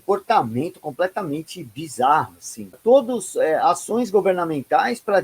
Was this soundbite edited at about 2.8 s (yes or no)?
yes